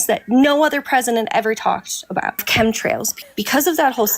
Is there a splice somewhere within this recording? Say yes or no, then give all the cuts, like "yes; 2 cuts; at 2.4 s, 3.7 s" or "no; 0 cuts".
yes; 2 cuts; at 2.4 s, 3.1 s